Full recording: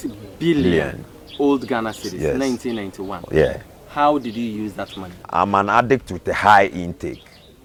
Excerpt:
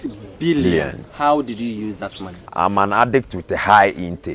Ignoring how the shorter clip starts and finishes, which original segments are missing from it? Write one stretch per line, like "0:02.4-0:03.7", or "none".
0:01.0-0:03.8

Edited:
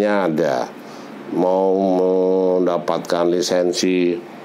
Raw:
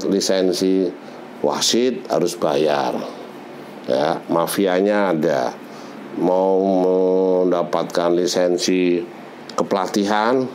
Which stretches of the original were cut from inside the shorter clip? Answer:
none

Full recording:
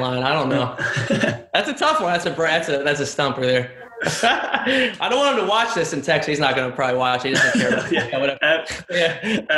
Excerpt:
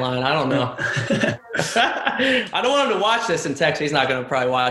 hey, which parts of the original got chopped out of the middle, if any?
0:01.4-0:03.9

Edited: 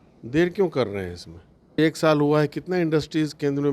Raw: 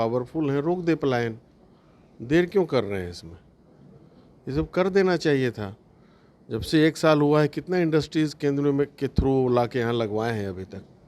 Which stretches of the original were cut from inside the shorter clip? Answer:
0:03.8-0:06.8

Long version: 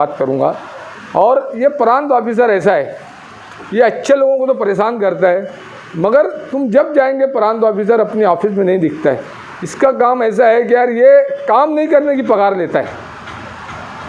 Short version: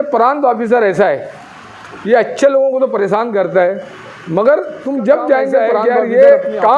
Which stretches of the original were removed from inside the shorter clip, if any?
0:07.4-0:10.6

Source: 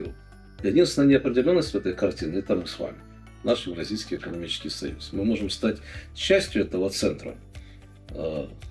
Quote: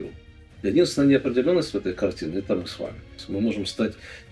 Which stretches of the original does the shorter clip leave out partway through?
0:03.1-0:05.0

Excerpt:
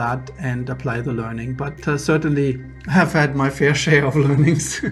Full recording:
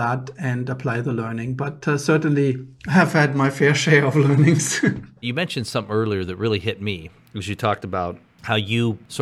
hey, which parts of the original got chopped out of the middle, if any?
none

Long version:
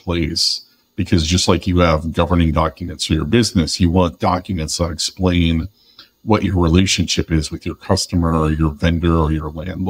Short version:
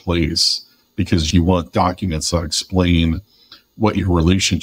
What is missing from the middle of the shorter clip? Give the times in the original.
0:01.3-0:03.7

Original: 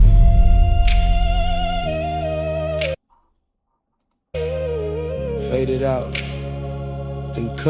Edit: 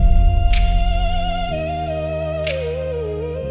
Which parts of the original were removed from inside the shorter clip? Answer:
0:03.0-0:04.4

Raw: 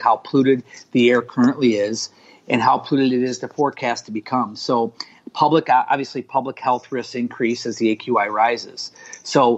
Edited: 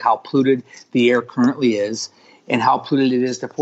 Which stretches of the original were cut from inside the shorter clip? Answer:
none

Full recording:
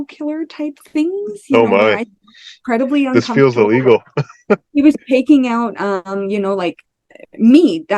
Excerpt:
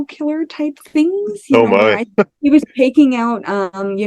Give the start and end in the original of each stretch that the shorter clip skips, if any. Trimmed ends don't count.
0:02.0-0:04.4

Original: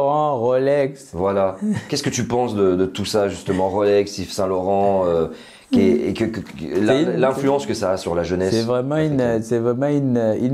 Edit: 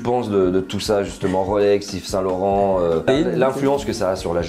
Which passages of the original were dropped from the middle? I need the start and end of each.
0:05.3-0:06.9

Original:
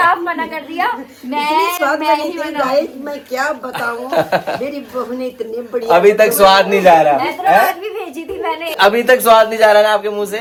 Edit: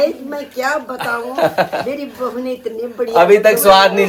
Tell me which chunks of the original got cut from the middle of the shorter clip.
none

